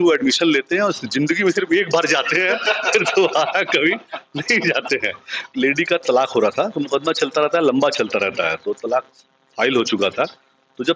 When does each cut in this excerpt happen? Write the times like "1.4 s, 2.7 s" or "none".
5.4 s

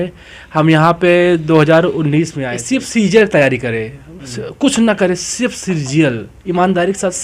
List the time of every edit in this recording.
2.5 s

